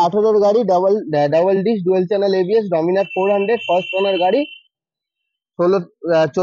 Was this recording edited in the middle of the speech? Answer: no; 0 cuts

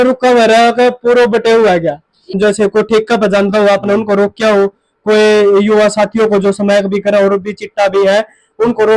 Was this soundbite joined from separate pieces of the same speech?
yes; 1 cut; at 2.4 s

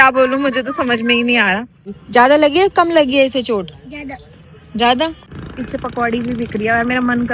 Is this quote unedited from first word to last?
no; 2 cuts; at 1.9 s, 5.3 s

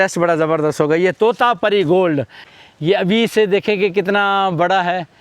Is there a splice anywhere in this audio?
yes; 1 cut; at 2.4 s

